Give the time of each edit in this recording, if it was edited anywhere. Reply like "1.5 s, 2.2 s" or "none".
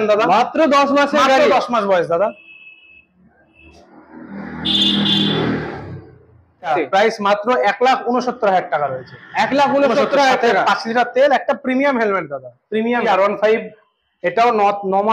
6.7 s, 13.0 s